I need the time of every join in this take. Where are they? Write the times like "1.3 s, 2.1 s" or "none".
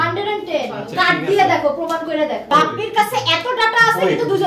2.5 s